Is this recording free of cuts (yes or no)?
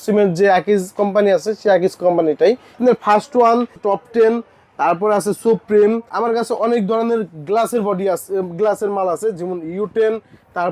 no